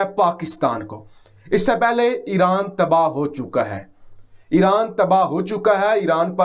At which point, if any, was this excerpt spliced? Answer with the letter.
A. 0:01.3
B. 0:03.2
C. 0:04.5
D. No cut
D